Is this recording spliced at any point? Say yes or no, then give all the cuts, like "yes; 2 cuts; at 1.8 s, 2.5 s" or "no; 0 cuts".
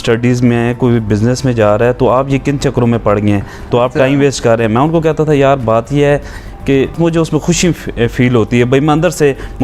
yes; 1 cut; at 7.0 s